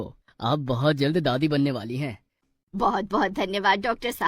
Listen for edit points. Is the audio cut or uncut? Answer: cut